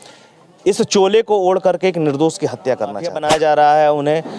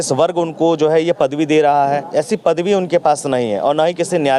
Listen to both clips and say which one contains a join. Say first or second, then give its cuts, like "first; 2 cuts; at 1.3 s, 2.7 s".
first; 1 cut; at 3.1 s